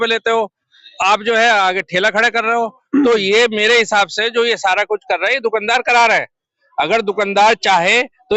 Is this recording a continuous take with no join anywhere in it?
yes; 0 cuts

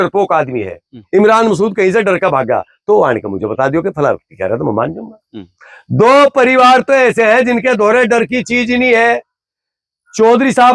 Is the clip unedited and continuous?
yes; 0 cuts

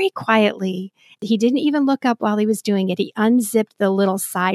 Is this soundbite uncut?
no; 1 cut; at 1.1 s

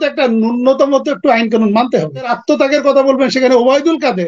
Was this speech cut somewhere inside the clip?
yes; 1 cut; at 2.3 s

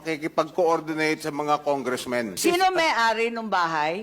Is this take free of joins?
no; 1 cut; at 2.4 s

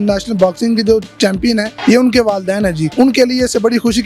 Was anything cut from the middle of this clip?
yes; 2 cuts; at 1.7 s, 2.9 s

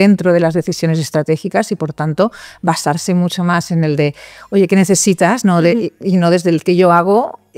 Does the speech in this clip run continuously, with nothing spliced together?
yes; 0 cuts

